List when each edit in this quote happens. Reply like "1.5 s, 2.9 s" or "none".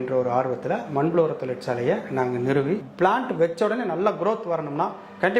2.9 s